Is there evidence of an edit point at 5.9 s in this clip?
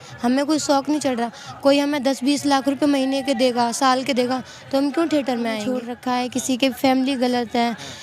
yes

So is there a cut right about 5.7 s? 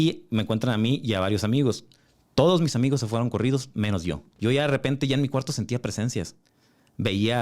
no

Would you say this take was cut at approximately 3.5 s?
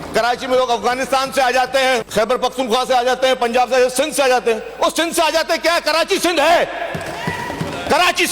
no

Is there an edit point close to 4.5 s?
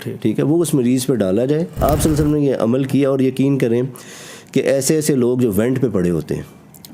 no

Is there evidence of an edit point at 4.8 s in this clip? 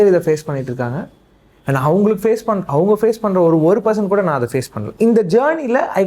yes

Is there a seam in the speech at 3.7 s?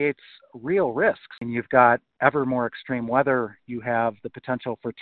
no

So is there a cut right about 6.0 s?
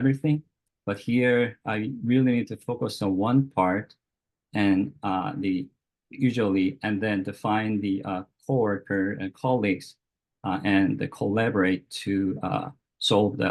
no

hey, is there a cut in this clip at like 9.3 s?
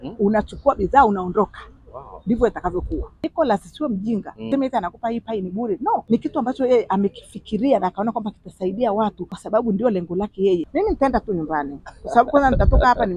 yes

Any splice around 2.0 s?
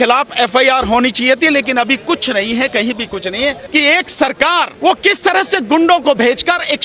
no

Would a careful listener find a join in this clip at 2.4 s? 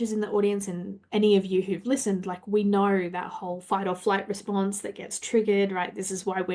no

